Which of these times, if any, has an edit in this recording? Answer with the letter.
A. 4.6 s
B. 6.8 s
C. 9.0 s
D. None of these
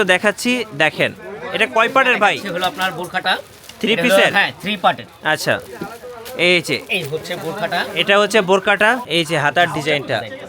C